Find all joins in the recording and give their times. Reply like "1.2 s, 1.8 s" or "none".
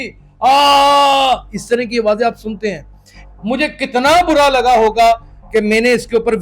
3.1 s